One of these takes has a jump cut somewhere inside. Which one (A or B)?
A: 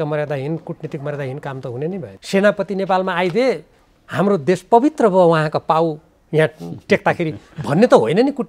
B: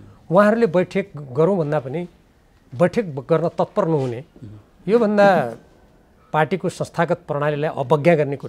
A